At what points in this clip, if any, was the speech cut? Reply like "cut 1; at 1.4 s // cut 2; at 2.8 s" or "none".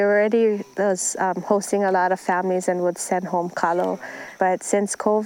cut 1; at 4.2 s

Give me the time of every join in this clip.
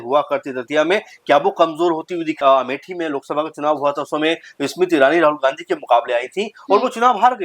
cut 1; at 2.3 s

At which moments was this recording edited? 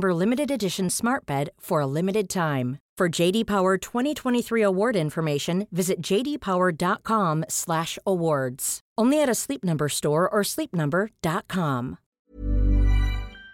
cut 1; at 12.1 s

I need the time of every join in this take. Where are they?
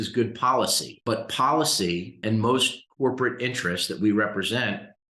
cut 1; at 1.0 s // cut 2; at 2.2 s

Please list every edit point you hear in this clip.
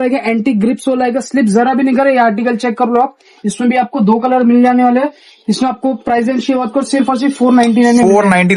none

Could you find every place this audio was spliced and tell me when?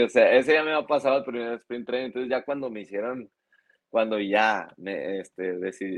none

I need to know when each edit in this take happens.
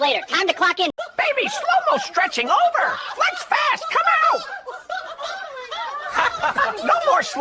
cut 1; at 1.0 s

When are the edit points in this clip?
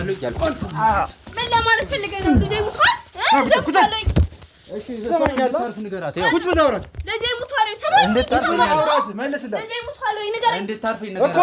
none

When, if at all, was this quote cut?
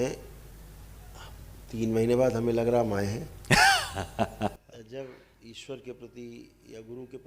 cut 1; at 4.6 s

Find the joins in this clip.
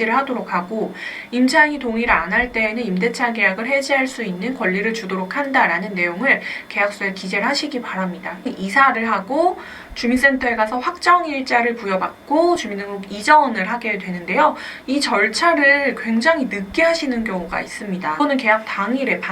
cut 1; at 8.4 s // cut 2; at 18.2 s

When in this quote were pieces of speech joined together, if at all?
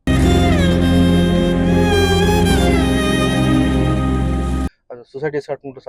cut 1; at 4.7 s

